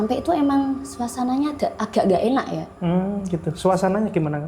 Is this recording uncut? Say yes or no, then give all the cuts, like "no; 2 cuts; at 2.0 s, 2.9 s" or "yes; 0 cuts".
yes; 0 cuts